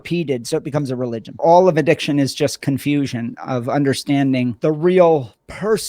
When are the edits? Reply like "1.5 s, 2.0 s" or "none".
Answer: 1.4 s, 4.6 s